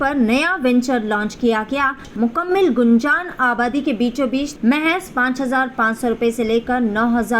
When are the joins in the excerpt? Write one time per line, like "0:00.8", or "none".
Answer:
0:02.1
0:04.5